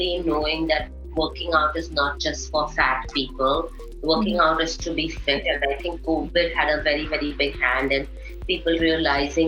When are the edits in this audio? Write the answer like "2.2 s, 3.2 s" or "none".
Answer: none